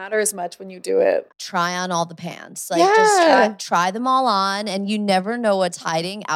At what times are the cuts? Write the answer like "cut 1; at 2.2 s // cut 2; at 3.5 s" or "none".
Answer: cut 1; at 1.4 s